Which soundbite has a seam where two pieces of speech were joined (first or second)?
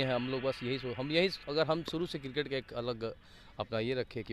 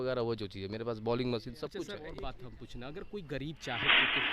second